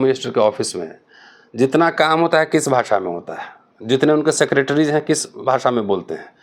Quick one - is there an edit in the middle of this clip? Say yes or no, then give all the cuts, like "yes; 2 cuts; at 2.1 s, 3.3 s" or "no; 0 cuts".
no; 0 cuts